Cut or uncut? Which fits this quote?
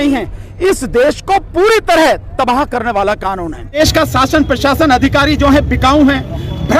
cut